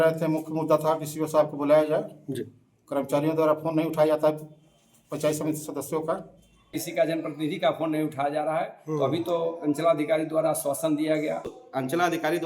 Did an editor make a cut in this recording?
yes; 2 cuts; at 6.8 s, 11.6 s

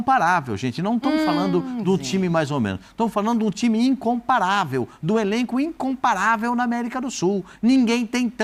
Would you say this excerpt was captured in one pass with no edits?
yes; 0 cuts

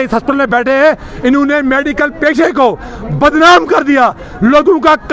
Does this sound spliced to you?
no; 0 cuts

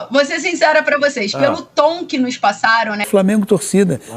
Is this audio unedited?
no; 1 cut; at 3.1 s

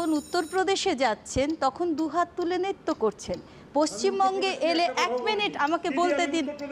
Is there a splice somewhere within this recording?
no; 0 cuts

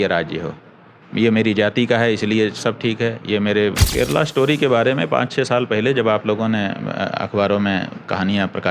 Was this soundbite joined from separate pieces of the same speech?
yes; 1 cut; at 3.8 s

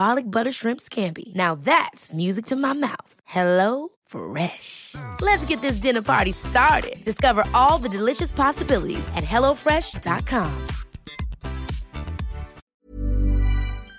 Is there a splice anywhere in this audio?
yes; 1 cut; at 12.7 s

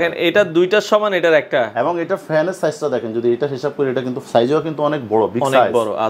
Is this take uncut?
yes; 0 cuts

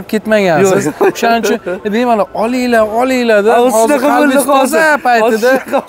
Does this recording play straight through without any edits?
yes; 0 cuts

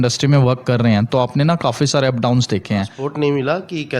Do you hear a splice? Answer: yes; 1 cut; at 3.0 s

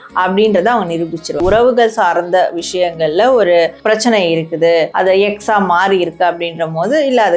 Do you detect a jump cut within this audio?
yes; 3 cuts; at 1.4 s, 3.8 s, 4.9 s

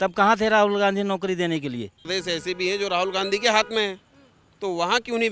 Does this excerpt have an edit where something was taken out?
yes; 1 cut; at 2.1 s

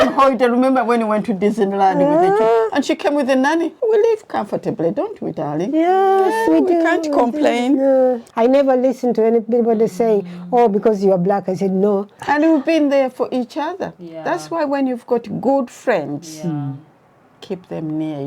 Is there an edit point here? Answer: yes; 3 cuts; at 3.7 s, 8.2 s, 12.2 s

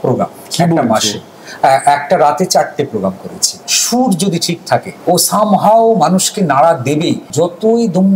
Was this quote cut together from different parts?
yes; 3 cuts; at 3.6 s, 4.9 s, 7.3 s

